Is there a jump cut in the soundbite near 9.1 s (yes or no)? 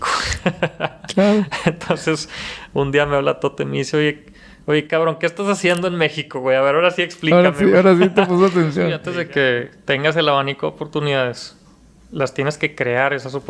yes